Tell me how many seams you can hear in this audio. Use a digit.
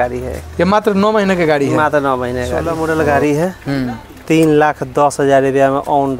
1